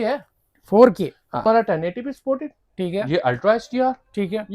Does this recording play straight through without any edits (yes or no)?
no